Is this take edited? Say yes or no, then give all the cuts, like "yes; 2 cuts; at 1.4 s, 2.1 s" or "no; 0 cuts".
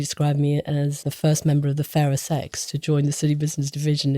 yes; 1 cut; at 1.0 s